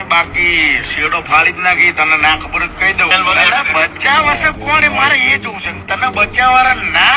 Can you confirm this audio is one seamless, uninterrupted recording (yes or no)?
no